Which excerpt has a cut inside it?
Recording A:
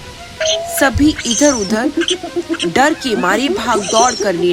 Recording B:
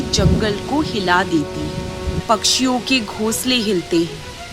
B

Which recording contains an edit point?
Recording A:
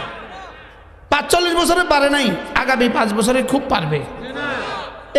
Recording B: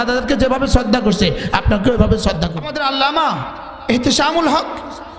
B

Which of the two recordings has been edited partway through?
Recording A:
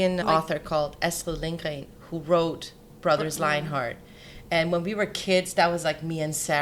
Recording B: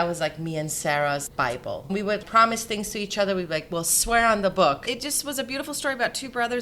B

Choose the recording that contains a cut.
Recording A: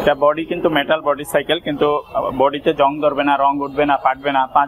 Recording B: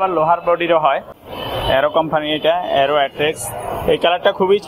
B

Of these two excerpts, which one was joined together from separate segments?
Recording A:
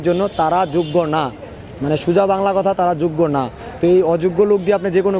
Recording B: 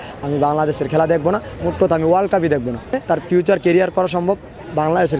B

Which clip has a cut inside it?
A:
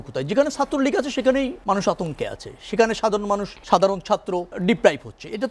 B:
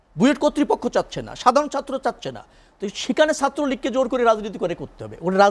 A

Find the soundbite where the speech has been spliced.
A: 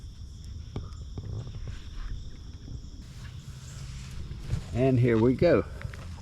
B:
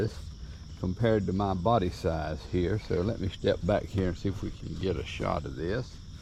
A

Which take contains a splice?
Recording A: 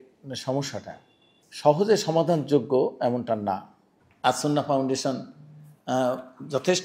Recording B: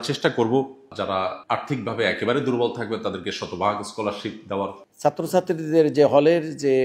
B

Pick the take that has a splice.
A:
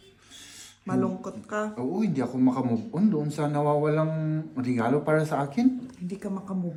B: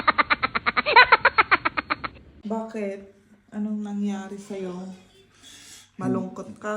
B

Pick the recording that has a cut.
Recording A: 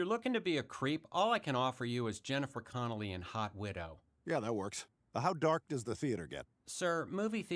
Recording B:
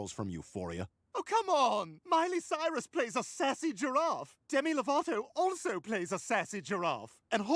B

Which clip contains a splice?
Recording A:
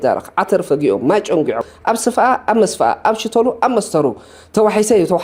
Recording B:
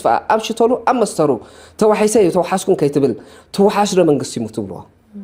A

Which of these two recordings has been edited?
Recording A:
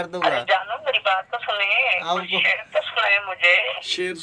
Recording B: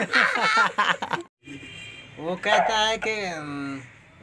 B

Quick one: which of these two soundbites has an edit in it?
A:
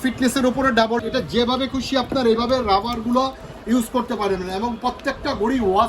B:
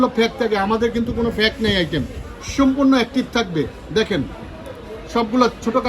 A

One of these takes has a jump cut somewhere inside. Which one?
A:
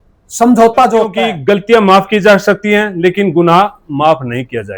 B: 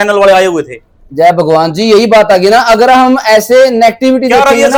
A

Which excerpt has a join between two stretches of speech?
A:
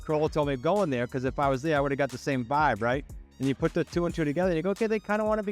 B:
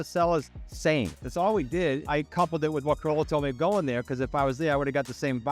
B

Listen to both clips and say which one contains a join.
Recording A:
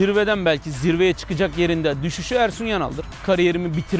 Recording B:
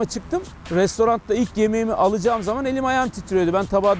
A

